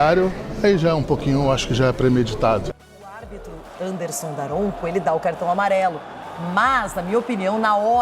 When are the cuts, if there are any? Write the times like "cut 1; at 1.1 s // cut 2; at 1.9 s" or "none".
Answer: cut 1; at 2.7 s

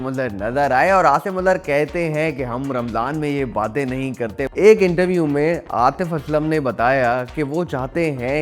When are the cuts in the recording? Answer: cut 1; at 4.5 s

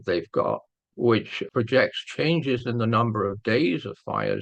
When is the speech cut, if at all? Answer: cut 1; at 1.4 s

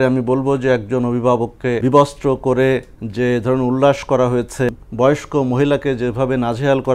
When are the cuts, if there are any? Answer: cut 1; at 1.8 s // cut 2; at 4.7 s

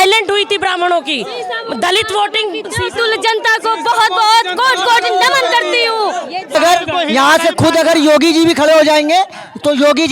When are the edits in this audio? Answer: cut 1; at 6.5 s

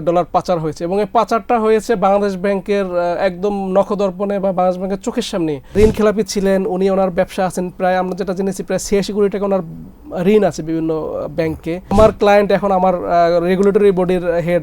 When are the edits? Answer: cut 1; at 5.7 s // cut 2; at 11.9 s

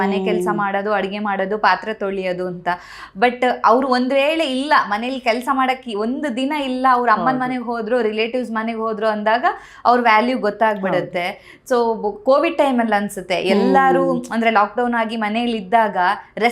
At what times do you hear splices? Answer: none

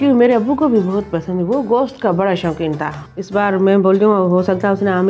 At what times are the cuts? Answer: cut 1; at 2.9 s

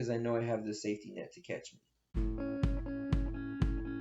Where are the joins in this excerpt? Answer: cut 1; at 1.9 s

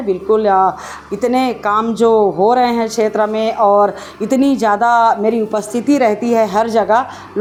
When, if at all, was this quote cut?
none

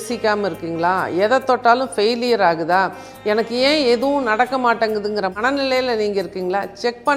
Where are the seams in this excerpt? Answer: none

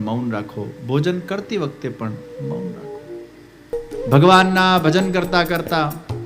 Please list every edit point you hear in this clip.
cut 1; at 3.9 s

